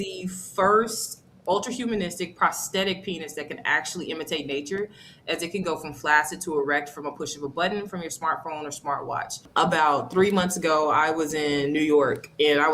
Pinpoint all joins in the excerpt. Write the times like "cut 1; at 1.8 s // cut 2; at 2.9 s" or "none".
cut 1; at 9.4 s